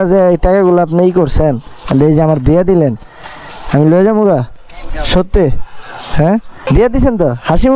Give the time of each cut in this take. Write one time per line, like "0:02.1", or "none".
0:06.7